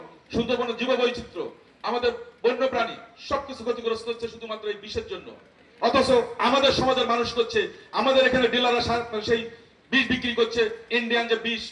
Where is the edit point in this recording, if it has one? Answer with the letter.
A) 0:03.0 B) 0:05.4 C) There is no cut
C